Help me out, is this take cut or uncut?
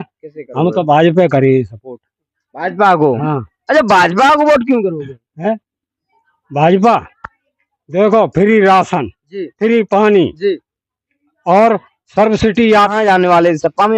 cut